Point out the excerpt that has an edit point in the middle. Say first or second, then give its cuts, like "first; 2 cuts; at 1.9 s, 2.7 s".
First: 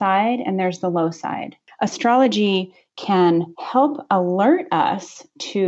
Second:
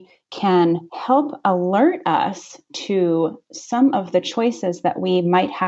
first; 1 cut; at 1.6 s